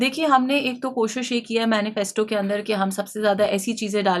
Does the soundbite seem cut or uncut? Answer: uncut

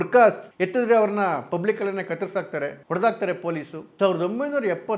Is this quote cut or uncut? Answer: cut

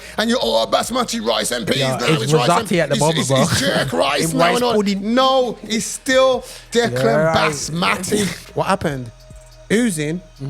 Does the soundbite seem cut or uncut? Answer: cut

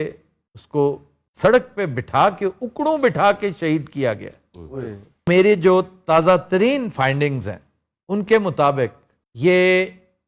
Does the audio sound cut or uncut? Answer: cut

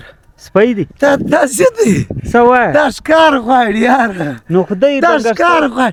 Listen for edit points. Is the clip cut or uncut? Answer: uncut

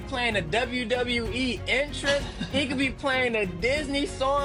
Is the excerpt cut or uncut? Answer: uncut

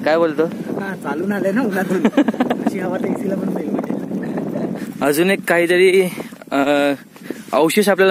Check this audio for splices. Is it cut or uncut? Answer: cut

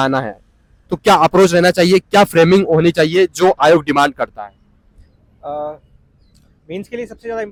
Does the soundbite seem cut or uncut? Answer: uncut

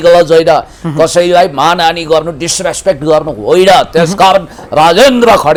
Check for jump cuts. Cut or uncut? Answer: uncut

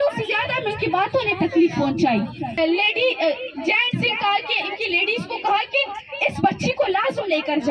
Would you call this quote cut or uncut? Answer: cut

